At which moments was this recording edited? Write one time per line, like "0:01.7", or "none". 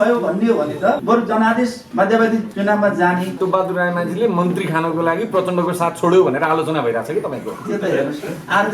0:01.0
0:01.8
0:02.5
0:03.4